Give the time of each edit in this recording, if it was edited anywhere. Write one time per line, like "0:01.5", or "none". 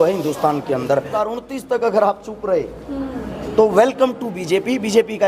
0:01.1

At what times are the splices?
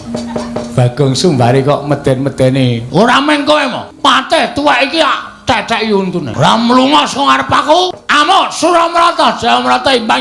0:03.9
0:06.3
0:08.0

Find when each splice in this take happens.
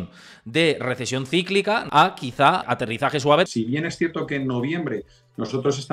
0:01.8
0:02.7
0:03.5

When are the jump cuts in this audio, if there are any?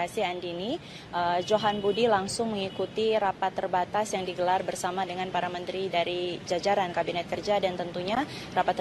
0:01.2

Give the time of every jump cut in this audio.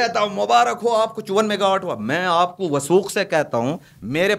none

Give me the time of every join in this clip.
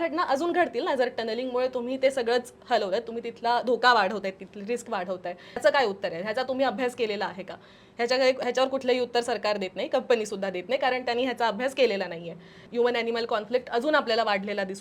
0:05.6
0:12.6

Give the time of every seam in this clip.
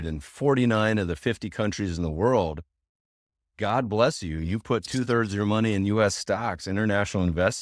none

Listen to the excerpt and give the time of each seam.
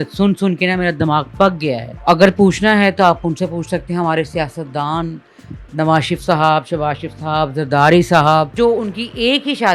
0:01.9
0:08.5

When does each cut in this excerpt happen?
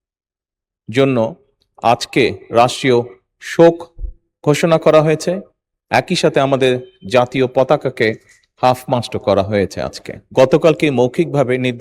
0:10.2

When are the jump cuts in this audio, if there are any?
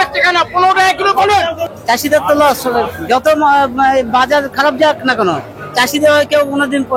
0:01.6

